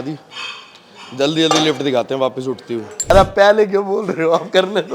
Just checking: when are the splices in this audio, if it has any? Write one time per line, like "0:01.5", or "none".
0:03.1